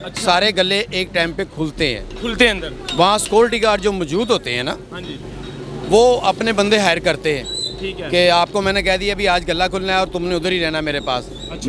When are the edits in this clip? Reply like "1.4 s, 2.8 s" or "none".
none